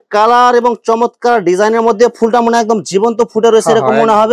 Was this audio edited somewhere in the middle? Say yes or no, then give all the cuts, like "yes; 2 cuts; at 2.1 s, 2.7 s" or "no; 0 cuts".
no; 0 cuts